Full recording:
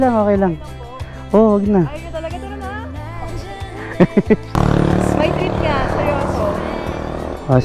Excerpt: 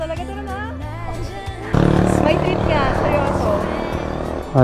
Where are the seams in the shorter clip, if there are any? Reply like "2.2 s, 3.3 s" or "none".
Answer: 1.7 s